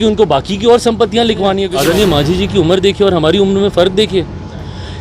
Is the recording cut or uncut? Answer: cut